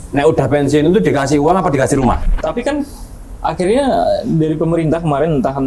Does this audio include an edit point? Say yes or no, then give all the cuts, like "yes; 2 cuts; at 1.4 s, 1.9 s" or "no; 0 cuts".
yes; 1 cut; at 2.2 s